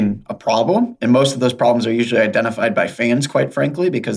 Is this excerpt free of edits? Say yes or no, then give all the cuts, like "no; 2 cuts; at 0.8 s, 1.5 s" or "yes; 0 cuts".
yes; 0 cuts